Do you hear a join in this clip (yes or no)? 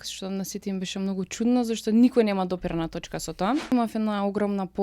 yes